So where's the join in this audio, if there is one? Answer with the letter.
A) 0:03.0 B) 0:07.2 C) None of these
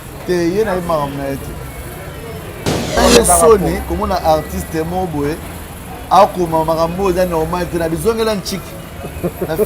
A